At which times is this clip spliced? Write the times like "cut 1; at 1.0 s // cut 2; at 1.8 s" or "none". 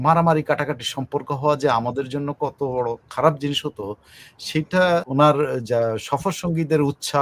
cut 1; at 5.1 s